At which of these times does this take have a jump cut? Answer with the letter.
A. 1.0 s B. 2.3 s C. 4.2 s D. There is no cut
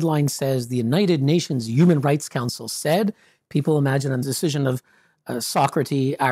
C